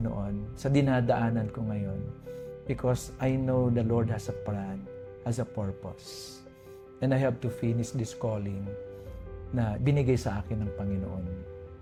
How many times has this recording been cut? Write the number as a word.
zero